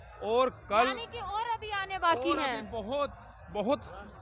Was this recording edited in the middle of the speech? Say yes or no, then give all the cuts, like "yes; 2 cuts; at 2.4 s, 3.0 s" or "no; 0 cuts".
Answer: no; 0 cuts